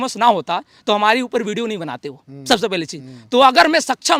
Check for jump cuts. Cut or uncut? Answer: uncut